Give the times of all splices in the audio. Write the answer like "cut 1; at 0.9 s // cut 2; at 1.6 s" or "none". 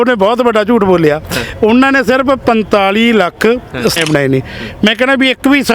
cut 1; at 4.0 s